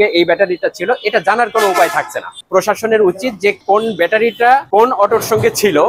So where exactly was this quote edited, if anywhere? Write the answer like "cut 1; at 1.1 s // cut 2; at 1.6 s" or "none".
none

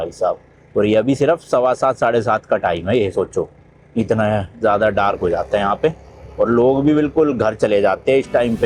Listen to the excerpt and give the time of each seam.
none

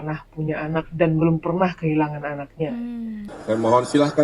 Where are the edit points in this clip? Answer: cut 1; at 3.3 s

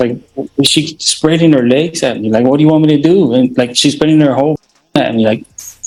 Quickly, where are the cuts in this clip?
none

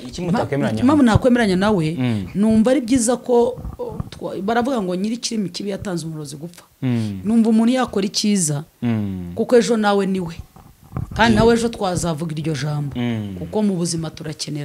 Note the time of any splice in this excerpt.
none

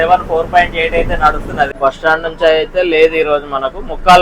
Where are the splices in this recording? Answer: cut 1; at 1.7 s

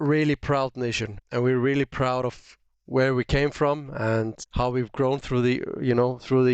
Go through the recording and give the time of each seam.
cut 1; at 1.2 s // cut 2; at 4.4 s

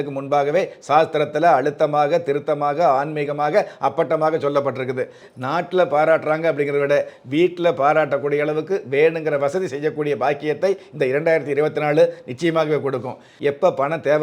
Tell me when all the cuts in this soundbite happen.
cut 1; at 5.3 s // cut 2; at 13.3 s

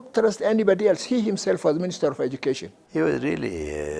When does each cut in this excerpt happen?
cut 1; at 2.7 s

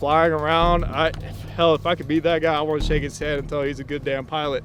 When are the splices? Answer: none

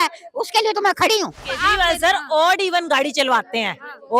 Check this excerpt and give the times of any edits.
cut 1; at 1.4 s

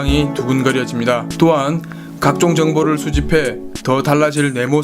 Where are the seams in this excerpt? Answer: cut 1; at 2.1 s

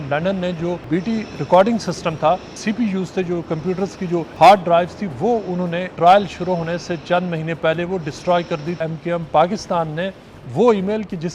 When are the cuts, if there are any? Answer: cut 1; at 0.8 s // cut 2; at 2.5 s // cut 3; at 4.3 s // cut 4; at 5.9 s // cut 5; at 8.8 s

